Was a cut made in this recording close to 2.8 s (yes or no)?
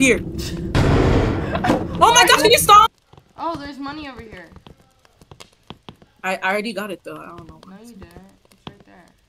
yes